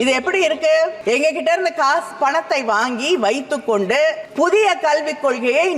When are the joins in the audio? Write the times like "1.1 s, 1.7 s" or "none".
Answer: 1.0 s, 4.2 s